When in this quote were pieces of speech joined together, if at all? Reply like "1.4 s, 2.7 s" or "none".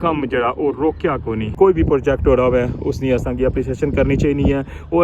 1.5 s